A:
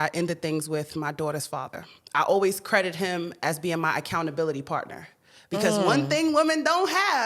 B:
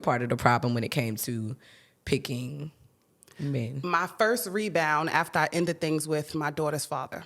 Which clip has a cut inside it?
B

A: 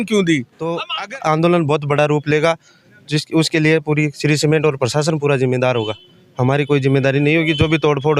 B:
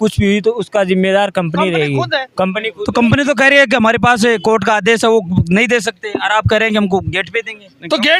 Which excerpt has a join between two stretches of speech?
A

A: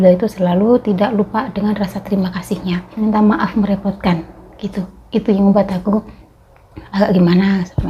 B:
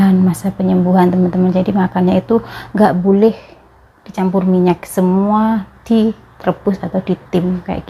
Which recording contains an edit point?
A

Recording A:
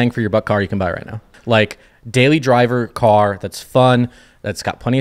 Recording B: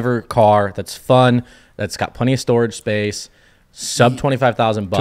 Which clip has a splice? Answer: A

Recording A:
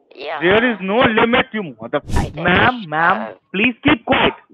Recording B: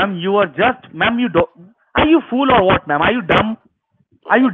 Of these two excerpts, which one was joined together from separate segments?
A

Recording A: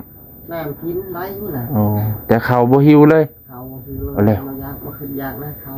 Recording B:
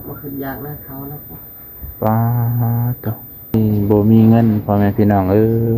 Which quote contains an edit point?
B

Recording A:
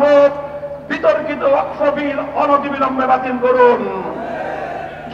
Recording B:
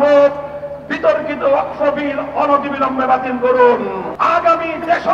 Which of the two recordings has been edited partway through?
B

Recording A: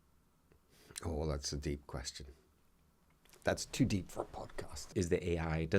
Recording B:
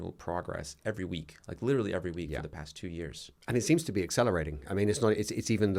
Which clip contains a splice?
A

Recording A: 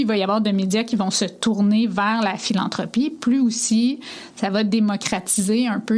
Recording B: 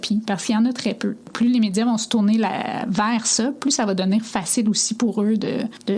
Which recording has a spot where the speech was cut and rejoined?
B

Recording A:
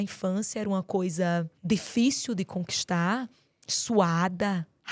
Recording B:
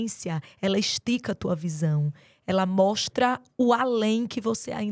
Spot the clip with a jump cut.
A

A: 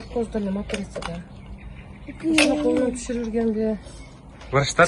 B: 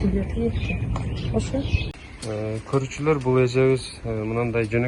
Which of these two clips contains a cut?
B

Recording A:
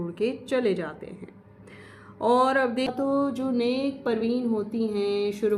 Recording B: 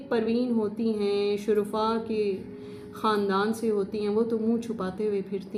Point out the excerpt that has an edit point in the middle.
A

